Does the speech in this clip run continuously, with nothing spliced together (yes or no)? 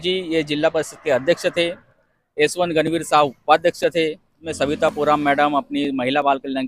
no